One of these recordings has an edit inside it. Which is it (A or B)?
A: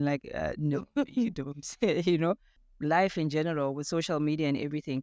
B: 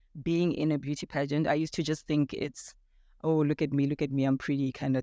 A